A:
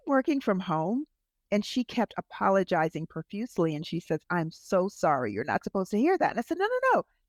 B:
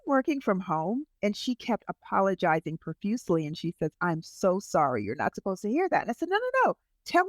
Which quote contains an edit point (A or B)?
B